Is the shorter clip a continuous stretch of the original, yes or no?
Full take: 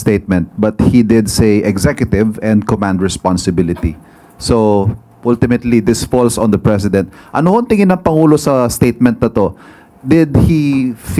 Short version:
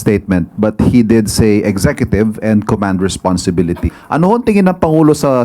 no